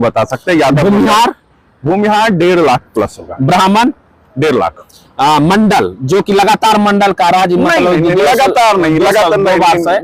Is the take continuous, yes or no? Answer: yes